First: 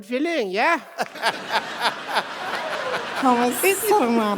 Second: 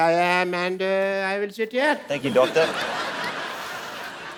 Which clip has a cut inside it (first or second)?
first